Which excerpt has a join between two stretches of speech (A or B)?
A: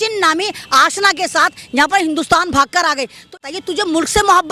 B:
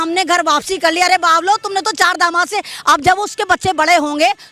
A